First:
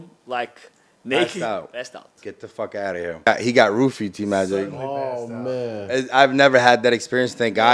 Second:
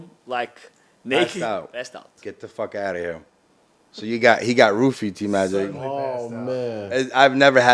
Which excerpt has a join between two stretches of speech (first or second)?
first